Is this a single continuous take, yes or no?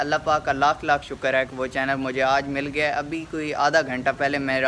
yes